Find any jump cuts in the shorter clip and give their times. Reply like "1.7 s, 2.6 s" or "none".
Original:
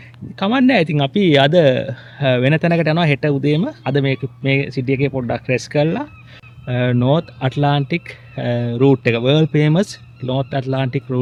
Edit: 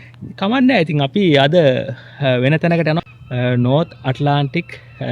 3.0 s